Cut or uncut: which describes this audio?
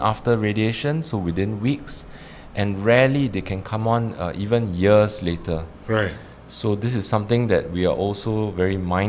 uncut